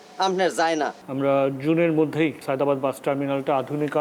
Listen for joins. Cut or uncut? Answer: cut